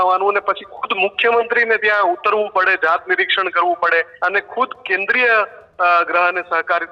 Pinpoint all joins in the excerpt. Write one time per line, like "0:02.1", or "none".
0:04.1